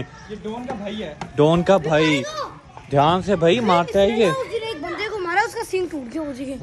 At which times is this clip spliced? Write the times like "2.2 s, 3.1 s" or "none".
none